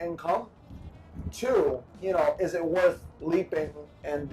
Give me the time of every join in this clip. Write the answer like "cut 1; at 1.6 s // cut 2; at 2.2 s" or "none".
cut 1; at 1.9 s